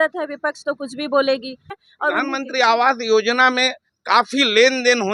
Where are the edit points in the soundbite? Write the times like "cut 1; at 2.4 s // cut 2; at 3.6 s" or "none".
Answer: cut 1; at 1.7 s